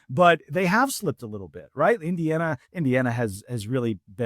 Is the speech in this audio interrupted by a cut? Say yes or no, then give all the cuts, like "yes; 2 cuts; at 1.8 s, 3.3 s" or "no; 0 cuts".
yes; 1 cut; at 2.7 s